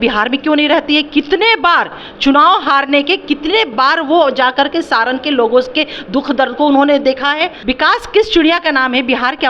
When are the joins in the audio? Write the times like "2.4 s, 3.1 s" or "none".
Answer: 7.6 s